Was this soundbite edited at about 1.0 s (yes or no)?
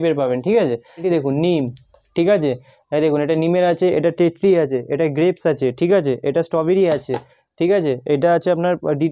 no